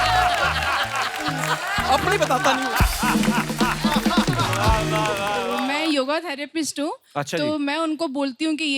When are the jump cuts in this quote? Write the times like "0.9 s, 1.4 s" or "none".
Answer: 5.6 s